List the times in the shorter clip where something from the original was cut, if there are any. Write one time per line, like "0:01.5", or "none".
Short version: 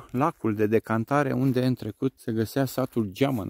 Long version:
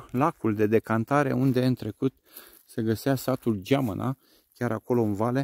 0:02.2